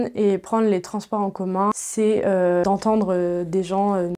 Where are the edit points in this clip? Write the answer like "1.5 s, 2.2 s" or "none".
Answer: 1.8 s, 2.6 s